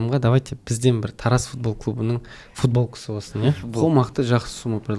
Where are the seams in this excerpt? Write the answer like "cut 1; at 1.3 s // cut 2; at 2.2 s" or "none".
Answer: cut 1; at 3.8 s